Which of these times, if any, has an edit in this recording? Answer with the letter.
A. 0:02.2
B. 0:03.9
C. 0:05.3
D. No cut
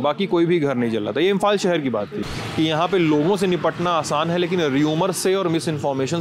A